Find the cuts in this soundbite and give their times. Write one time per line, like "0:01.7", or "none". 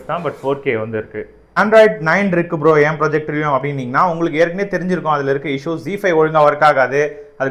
0:01.6